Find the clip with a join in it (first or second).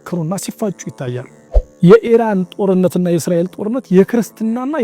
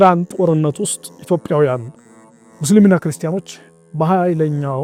first